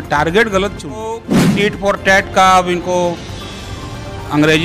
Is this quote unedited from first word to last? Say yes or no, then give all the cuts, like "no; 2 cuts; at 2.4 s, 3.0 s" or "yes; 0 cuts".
no; 1 cut; at 1.4 s